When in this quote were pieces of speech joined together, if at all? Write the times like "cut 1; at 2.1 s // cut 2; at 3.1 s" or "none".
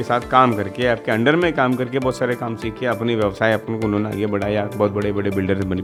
none